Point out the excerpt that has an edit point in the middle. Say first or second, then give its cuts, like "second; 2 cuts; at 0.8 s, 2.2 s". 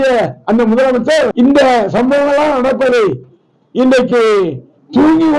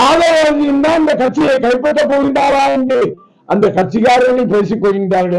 first; 1 cut; at 1.3 s